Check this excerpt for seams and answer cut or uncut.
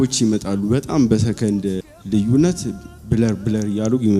cut